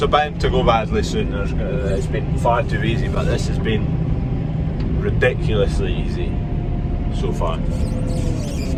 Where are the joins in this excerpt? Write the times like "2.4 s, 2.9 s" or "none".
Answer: none